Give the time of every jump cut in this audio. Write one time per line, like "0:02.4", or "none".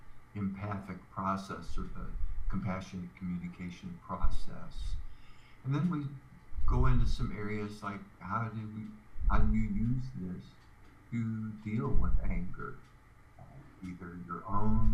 none